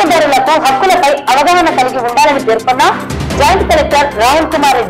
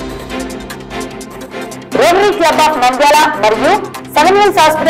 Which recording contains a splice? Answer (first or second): second